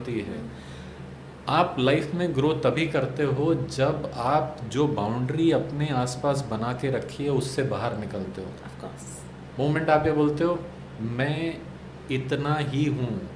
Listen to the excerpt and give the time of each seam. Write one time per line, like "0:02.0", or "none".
none